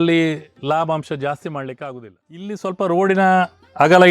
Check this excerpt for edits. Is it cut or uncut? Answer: cut